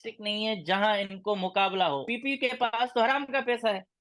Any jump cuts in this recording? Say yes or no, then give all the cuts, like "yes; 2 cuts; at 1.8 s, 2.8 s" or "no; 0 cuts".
yes; 1 cut; at 2.0 s